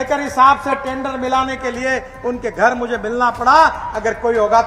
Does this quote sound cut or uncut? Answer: uncut